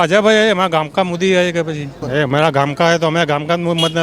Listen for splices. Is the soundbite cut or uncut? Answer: cut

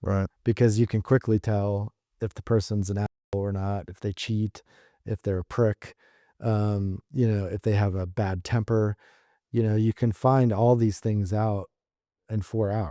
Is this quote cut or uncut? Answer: uncut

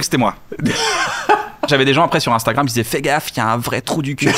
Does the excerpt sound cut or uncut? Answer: cut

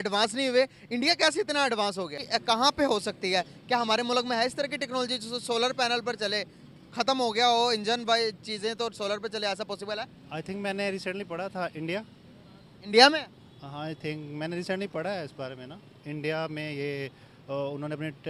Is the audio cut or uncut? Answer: cut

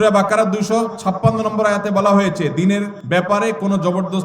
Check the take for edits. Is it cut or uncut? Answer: cut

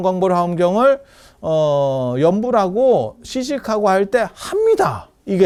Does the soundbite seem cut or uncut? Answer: uncut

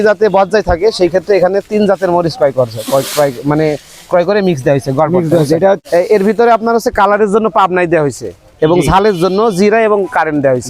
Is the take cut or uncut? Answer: cut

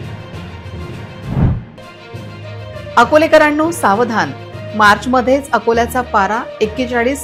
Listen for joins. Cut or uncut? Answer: uncut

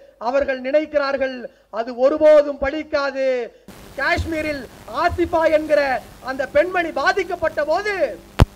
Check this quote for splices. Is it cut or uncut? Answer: cut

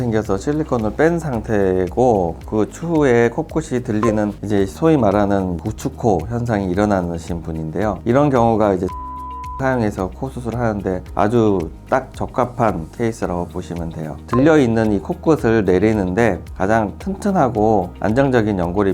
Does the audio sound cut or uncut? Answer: cut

